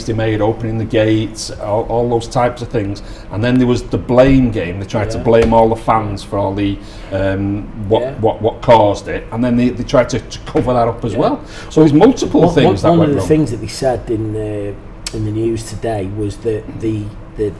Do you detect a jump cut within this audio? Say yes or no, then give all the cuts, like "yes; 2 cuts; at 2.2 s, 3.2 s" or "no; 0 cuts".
no; 0 cuts